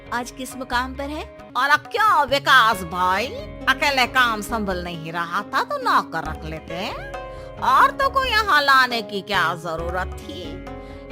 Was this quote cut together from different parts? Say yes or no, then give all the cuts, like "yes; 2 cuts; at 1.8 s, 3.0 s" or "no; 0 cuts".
yes; 1 cut; at 1.3 s